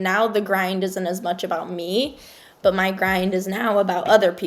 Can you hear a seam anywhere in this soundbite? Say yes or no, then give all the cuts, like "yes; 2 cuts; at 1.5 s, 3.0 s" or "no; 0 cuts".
no; 0 cuts